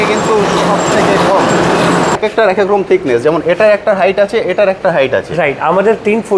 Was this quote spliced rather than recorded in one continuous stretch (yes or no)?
yes